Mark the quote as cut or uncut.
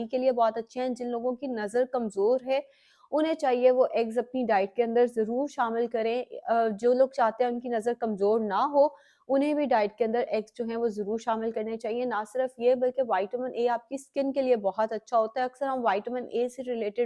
uncut